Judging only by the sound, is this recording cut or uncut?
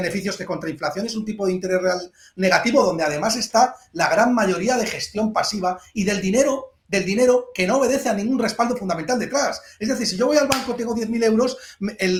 uncut